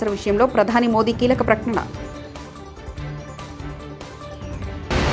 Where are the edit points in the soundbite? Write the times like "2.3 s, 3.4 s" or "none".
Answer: none